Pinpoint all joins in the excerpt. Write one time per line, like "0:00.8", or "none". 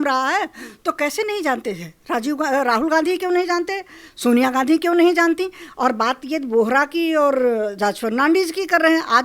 none